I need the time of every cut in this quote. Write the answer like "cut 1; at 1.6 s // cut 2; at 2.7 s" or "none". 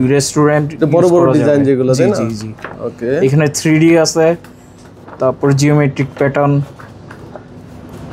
none